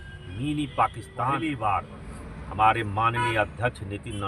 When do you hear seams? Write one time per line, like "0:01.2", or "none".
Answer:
0:01.3